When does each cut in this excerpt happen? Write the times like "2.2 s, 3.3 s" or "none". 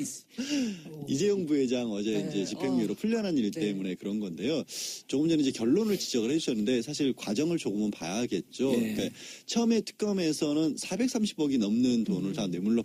none

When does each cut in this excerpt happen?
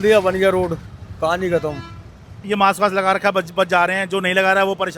2.4 s

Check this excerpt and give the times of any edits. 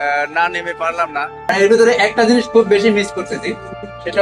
1.4 s

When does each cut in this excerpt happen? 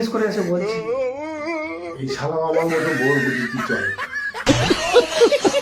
4.5 s

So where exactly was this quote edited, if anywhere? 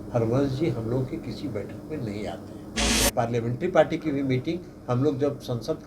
2.9 s

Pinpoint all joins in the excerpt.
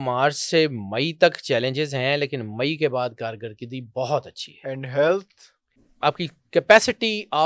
5.8 s

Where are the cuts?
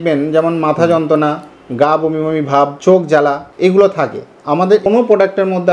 2.8 s, 3.5 s, 4.8 s

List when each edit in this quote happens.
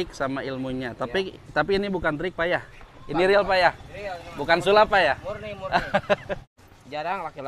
6.5 s

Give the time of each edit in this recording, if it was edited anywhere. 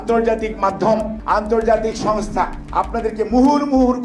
1.1 s, 2.6 s

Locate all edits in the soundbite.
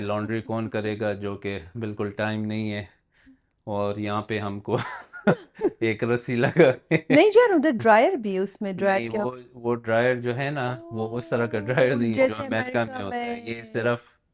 none

